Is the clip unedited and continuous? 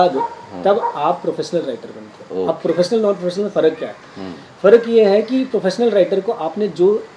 yes; 0 cuts

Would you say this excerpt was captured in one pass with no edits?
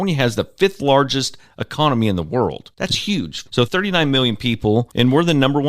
no; 1 cut; at 3.3 s

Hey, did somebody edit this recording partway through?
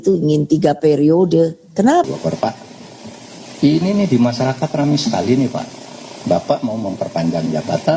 yes; 1 cut; at 2.1 s

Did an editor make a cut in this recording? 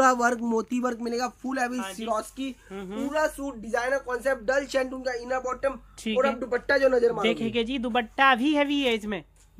no; 0 cuts

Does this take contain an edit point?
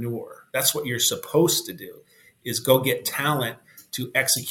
no; 0 cuts

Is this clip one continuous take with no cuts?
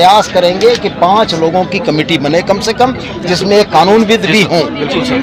yes; 0 cuts

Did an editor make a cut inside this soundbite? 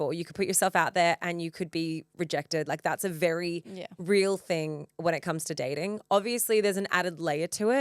no; 0 cuts

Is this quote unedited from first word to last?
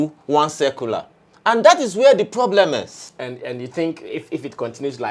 no; 1 cut; at 3.0 s

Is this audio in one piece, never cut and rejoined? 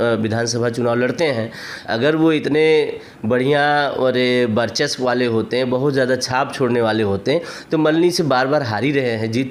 yes; 0 cuts

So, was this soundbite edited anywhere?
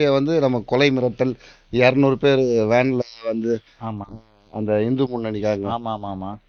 no; 0 cuts

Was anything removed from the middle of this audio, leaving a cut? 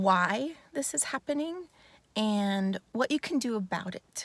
yes; 1 cut; at 2.8 s

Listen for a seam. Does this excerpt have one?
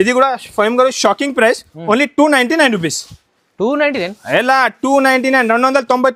no; 0 cuts

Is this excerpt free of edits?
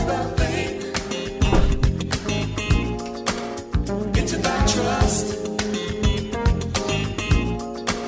no; 1 cut; at 7.1 s

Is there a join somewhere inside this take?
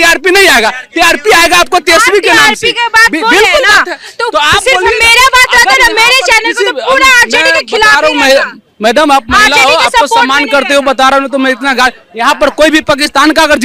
no; 0 cuts

